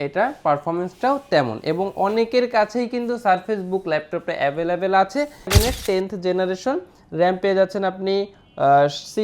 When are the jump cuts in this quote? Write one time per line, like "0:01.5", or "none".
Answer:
0:05.5

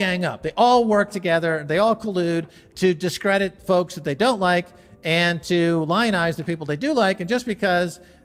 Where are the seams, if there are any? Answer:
none

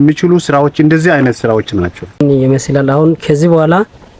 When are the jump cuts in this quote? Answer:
0:02.2

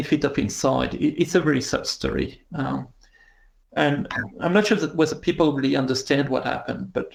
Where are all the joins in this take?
none

